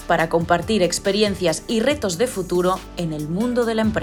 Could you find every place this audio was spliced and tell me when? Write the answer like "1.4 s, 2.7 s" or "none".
none